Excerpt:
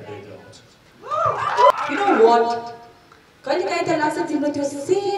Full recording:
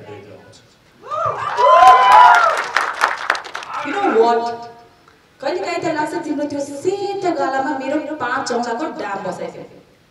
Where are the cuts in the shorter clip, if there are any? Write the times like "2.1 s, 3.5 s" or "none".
1.7 s